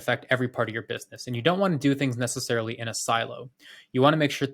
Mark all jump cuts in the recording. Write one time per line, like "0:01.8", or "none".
none